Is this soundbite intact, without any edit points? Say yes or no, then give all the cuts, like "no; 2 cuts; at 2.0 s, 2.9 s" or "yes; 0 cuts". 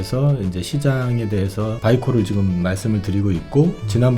no; 1 cut; at 1.8 s